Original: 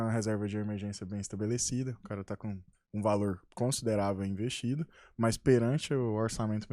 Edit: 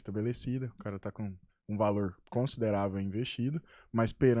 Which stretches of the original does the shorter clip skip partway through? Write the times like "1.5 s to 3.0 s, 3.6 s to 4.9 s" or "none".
none